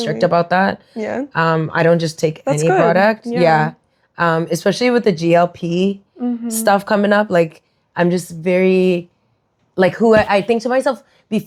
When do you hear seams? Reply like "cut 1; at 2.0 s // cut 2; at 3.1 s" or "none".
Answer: none